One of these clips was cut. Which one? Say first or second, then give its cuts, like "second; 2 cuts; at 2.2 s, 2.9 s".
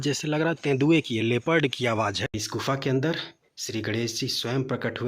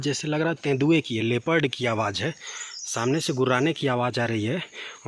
first; 1 cut; at 2.4 s